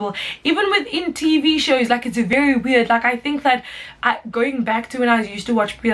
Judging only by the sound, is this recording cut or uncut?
uncut